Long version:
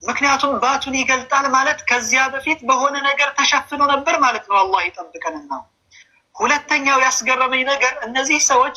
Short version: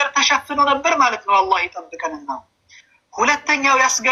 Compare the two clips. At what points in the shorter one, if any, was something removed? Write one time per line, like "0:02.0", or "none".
none